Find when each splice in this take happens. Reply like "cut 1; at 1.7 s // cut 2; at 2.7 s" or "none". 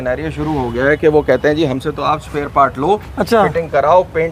none